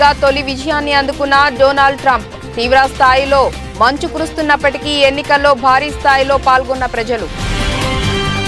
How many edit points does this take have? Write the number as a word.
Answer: one